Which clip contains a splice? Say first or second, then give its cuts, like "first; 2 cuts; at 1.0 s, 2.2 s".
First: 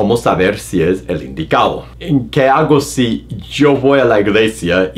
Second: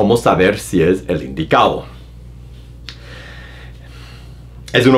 first; 1 cut; at 1.9 s